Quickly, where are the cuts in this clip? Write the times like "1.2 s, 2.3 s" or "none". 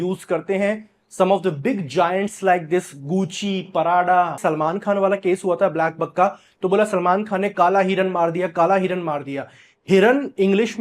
4.4 s